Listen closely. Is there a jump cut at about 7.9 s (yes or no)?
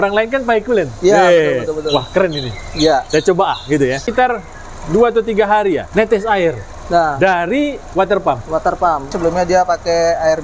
yes